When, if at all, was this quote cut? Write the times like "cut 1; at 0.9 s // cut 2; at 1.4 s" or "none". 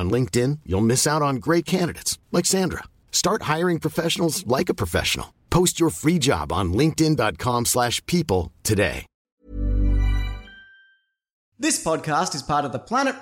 cut 1; at 11.5 s